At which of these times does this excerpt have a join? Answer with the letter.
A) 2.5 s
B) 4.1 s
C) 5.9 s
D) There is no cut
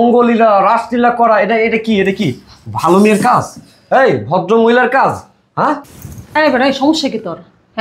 C